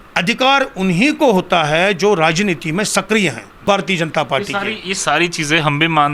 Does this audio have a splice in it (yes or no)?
yes